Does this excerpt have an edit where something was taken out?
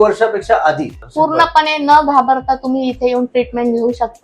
yes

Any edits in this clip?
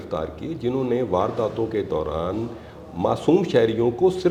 no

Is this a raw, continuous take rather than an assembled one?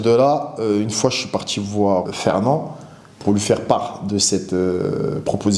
no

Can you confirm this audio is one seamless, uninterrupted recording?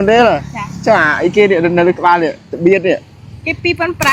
yes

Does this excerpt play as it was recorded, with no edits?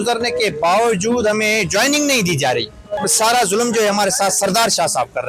no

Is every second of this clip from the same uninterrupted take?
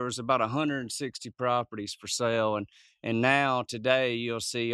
yes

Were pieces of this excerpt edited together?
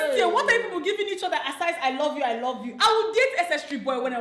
no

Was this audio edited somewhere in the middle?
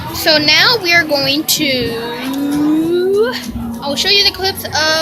no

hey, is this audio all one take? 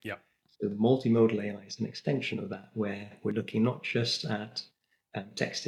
yes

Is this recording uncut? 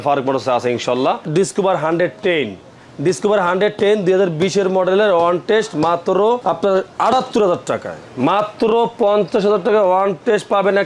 no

